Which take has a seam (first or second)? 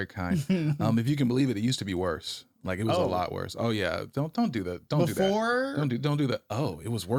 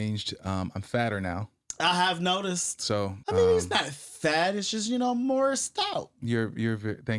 second